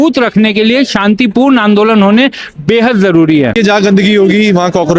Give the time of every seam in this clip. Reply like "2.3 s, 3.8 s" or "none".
3.6 s